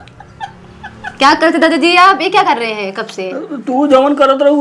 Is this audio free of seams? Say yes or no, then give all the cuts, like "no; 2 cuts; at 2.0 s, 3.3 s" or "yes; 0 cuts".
yes; 0 cuts